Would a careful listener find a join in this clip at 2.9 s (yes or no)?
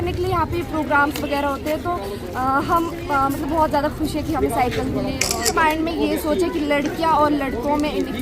no